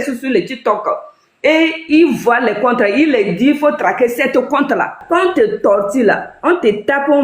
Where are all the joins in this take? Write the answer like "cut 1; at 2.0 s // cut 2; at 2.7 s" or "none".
cut 1; at 5.0 s